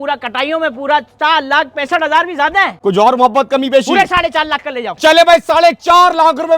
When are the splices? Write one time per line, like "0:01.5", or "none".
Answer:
0:02.7